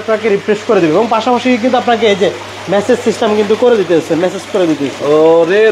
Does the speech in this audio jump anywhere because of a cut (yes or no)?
no